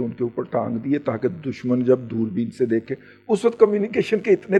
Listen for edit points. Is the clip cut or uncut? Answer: uncut